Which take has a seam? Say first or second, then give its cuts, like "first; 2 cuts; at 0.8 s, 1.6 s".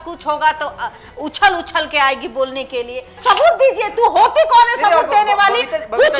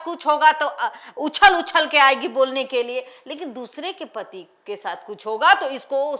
first; 1 cut; at 3.1 s